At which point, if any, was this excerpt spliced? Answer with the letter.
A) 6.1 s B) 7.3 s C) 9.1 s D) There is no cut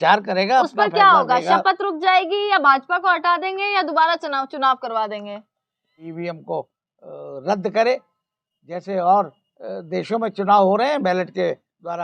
A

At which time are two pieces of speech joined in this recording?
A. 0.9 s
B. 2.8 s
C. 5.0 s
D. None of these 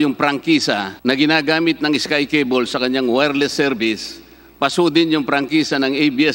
A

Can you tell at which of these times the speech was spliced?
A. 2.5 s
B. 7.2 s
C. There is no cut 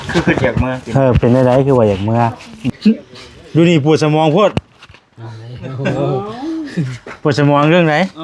A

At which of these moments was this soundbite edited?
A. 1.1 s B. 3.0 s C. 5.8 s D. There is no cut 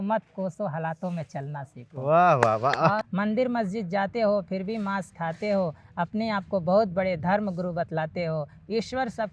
B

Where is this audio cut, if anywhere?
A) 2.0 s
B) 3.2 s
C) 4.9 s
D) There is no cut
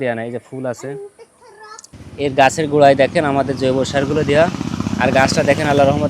A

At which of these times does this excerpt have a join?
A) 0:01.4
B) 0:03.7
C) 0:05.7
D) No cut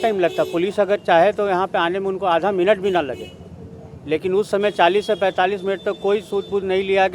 D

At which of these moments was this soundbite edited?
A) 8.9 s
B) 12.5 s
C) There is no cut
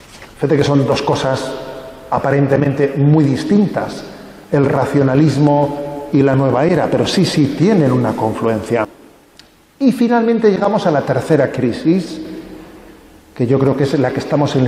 A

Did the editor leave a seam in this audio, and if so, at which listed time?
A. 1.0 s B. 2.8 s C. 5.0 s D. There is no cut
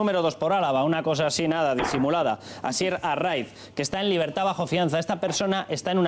C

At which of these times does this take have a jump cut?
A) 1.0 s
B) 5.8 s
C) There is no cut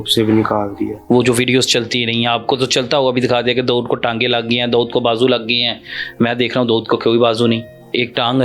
A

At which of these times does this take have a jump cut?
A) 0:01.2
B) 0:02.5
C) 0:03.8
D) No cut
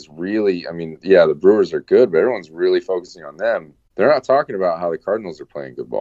C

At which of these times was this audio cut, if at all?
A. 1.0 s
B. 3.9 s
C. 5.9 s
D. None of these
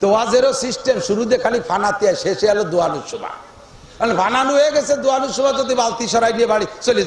D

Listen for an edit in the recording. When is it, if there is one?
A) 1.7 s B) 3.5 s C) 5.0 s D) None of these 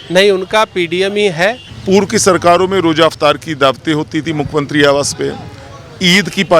A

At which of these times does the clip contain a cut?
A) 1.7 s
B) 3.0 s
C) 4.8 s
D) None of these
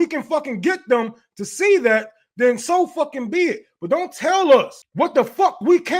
C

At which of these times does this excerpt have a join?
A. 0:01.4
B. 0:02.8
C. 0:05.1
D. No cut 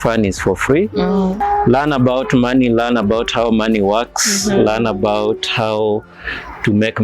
A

